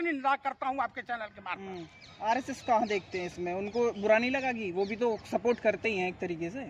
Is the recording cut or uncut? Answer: uncut